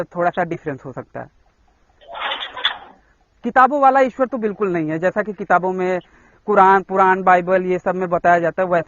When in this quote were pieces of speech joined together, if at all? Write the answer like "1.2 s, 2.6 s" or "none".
none